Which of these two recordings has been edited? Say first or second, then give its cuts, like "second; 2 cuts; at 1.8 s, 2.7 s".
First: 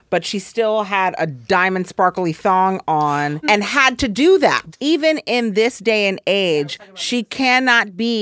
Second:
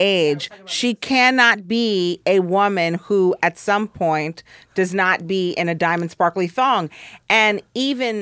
first; 2 cuts; at 3.4 s, 4.6 s